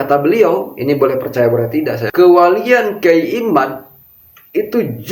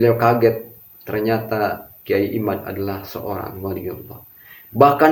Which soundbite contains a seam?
first; 1 cut; at 2.0 s

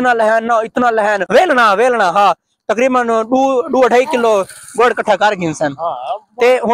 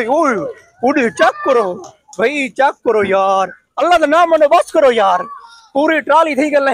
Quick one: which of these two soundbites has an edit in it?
first; 1 cut; at 1.2 s

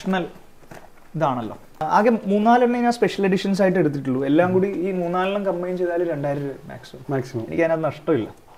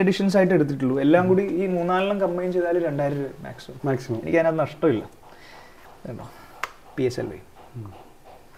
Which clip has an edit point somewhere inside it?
first; 1 cut; at 1.8 s

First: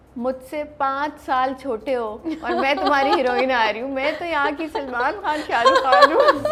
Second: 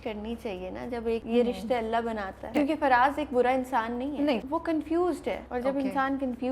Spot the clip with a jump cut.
second; 4 cuts; at 1.2 s, 2.4 s, 4.4 s, 5.4 s

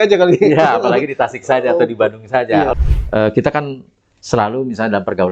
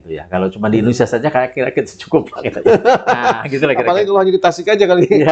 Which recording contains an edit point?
first; 1 cut; at 2.7 s

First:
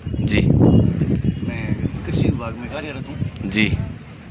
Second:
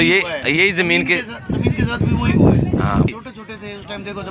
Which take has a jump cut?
second; 1 cut; at 3.1 s

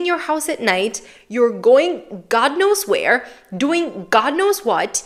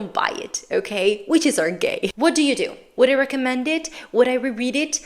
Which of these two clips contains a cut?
second; 1 cut; at 2.3 s

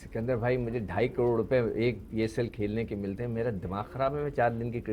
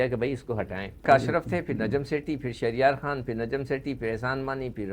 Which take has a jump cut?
second; 1 cut; at 1.0 s

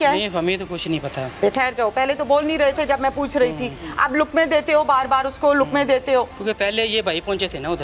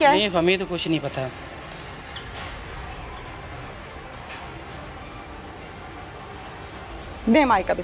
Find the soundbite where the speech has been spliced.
first; 2 cuts; at 1.4 s, 6.4 s

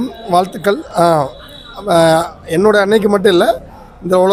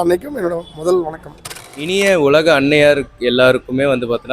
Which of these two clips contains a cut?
second; 1 cut; at 1.9 s

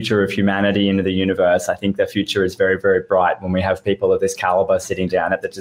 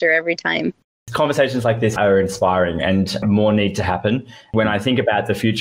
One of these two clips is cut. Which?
second; 3 cuts; at 0.9 s, 2.0 s, 4.5 s

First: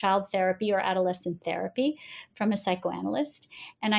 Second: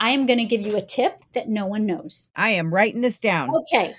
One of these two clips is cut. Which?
second; 2 cuts; at 1.2 s, 2.3 s

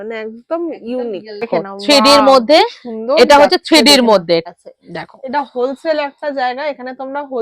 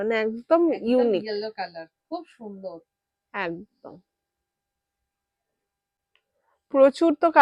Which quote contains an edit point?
first; 2 cuts; at 1.5 s, 4.5 s

